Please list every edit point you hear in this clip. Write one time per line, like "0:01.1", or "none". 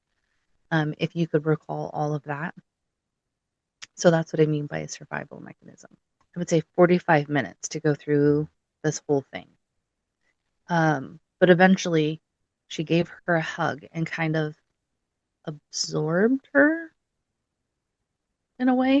0:06.1